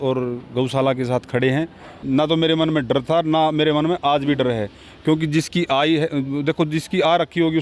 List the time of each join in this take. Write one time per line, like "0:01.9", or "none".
0:01.9